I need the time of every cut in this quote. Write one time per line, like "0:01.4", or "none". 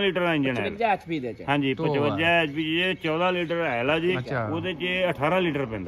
0:04.3